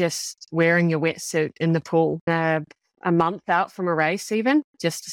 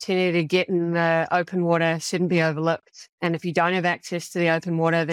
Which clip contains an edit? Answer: first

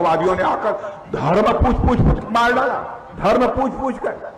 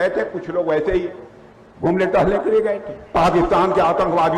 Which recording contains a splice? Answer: second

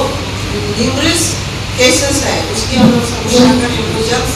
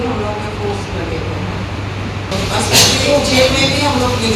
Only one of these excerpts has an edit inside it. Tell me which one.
second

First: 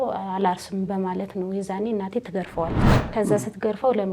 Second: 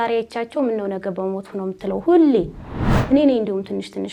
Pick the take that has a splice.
first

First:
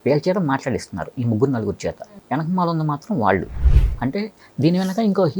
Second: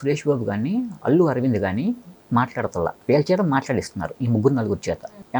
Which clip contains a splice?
first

